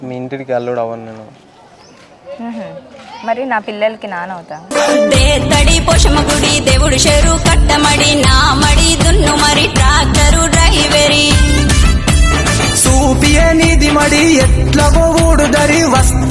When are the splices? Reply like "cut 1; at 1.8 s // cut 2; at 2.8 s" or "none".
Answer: none